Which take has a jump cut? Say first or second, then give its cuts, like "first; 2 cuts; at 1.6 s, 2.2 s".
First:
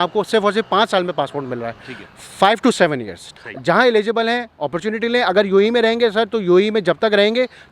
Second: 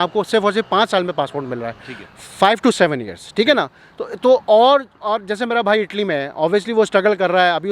first; 1 cut; at 3.2 s